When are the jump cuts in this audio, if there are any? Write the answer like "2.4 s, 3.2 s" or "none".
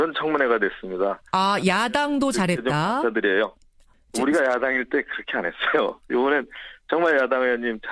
none